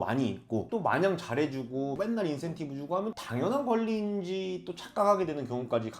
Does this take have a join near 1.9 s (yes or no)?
yes